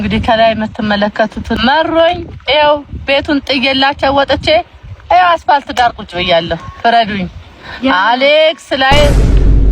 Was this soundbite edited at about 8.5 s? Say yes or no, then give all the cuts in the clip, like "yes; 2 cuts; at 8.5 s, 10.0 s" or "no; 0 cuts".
no; 1 cut; at 1.6 s